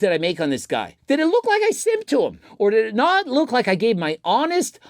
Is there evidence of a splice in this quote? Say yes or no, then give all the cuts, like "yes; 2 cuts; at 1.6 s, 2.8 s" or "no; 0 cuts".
yes; 2 cuts; at 0.9 s, 2.4 s